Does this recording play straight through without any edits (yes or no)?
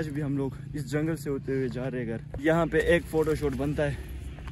no